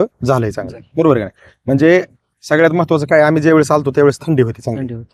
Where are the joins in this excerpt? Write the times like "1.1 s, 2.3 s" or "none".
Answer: none